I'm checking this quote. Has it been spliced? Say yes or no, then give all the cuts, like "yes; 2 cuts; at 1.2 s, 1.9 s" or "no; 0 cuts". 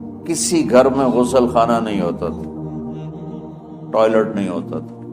yes; 2 cuts; at 2.3 s, 3.7 s